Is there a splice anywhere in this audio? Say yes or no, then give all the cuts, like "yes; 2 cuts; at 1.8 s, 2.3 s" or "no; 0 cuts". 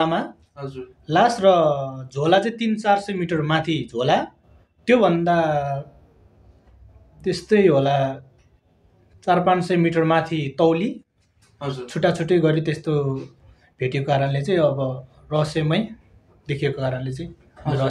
no; 0 cuts